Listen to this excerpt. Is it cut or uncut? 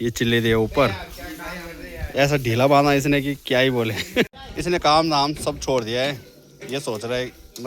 cut